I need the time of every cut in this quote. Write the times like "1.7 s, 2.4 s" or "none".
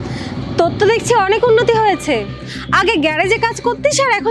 none